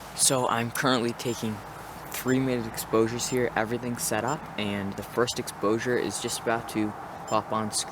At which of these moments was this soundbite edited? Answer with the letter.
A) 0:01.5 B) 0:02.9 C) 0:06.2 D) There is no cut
D